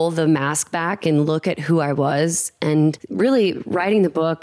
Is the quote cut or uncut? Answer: cut